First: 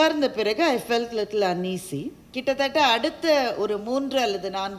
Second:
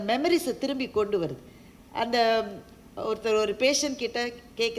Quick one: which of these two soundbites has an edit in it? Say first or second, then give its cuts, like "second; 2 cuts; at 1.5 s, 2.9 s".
first; 1 cut; at 2.2 s